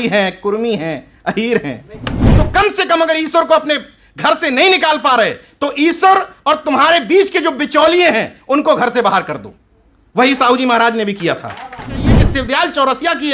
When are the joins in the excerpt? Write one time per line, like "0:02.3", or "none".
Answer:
0:02.3
0:12.2